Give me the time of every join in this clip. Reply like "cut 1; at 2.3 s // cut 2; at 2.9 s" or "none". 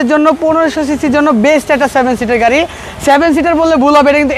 none